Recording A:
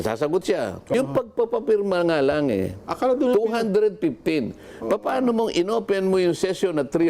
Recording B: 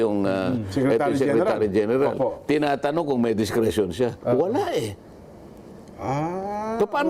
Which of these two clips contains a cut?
A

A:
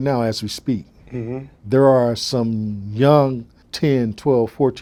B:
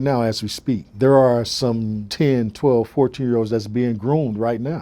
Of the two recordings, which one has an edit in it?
B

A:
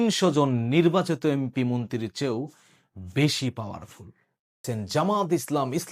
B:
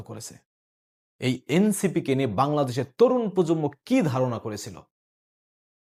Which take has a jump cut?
A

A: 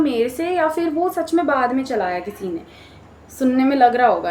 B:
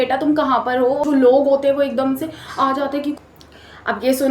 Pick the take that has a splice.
B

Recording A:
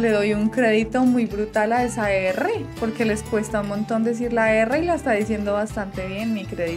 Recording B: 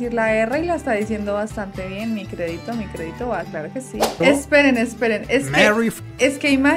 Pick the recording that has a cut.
B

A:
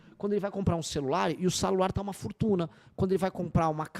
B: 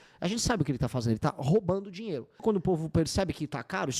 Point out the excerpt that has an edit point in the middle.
B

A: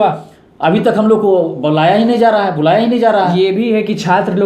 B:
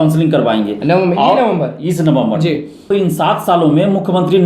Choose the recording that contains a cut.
B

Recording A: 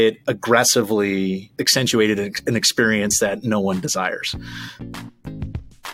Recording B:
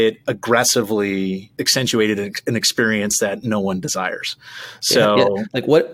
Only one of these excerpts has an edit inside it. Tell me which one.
A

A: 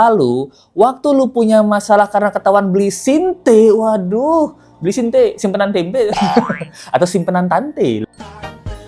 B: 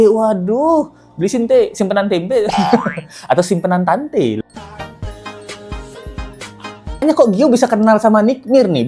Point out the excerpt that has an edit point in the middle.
B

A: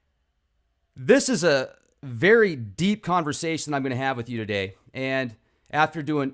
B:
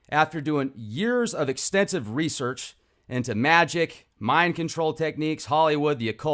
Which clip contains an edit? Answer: B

